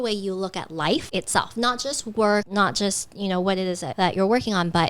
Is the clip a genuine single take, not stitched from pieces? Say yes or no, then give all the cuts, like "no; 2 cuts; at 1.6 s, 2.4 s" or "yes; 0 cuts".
no; 1 cut; at 3.9 s